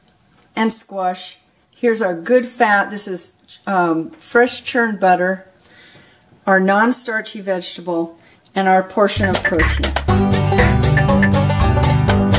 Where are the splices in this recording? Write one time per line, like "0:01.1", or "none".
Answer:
0:09.8